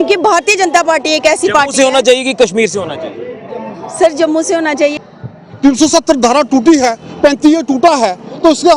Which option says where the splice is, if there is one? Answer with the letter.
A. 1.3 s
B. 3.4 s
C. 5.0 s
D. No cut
C